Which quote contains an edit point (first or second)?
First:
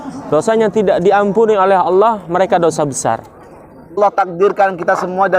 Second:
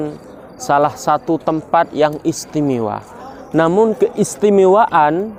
first